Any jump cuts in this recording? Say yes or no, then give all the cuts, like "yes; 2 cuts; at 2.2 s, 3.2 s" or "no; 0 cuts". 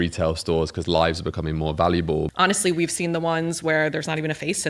yes; 1 cut; at 2.3 s